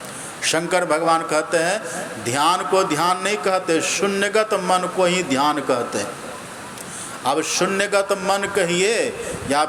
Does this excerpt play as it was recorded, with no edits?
yes; 0 cuts

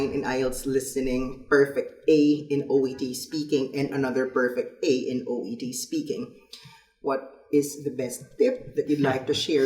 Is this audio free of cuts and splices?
yes; 0 cuts

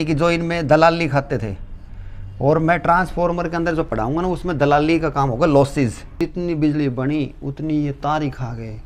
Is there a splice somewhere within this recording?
yes; 1 cut; at 6.1 s

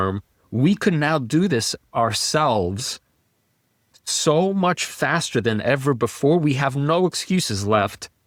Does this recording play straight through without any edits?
yes; 0 cuts

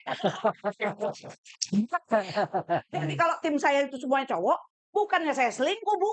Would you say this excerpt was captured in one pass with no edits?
yes; 0 cuts

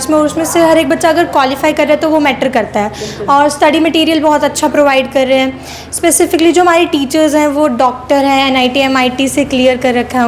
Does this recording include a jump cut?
no; 0 cuts

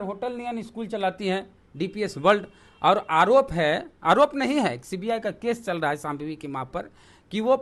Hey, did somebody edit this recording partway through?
no; 0 cuts

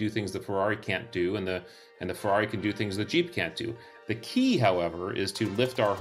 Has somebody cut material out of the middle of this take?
no; 0 cuts

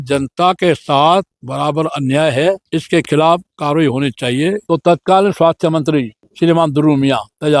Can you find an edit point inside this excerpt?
yes; 4 cuts; at 1.4 s, 2.6 s, 4.6 s, 6.2 s

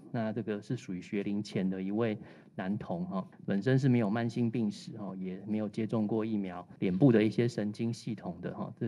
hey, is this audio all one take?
no; 2 cuts; at 3.3 s, 6.6 s

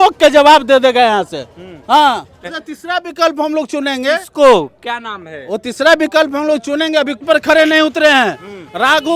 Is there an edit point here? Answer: yes; 2 cuts; at 2.6 s, 7.2 s

